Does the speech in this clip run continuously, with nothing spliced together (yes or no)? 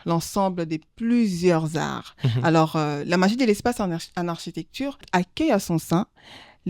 no